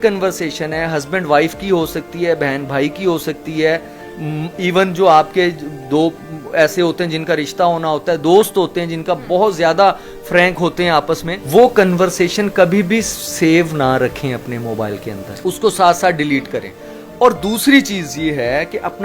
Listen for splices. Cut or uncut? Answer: uncut